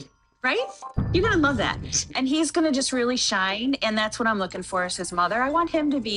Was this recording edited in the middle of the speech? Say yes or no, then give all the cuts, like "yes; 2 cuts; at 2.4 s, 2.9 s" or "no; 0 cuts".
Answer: no; 0 cuts